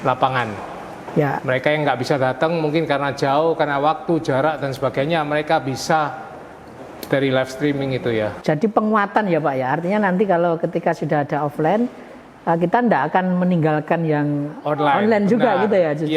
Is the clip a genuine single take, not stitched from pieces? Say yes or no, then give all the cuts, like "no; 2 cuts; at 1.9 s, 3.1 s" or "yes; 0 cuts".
no; 1 cut; at 8.3 s